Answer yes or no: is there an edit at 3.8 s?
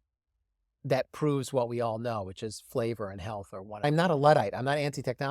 yes